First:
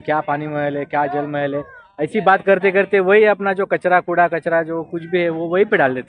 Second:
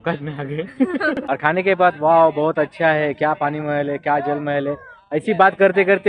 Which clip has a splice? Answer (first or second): second